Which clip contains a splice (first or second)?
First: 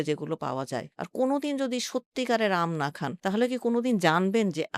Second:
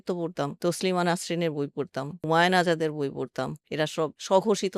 second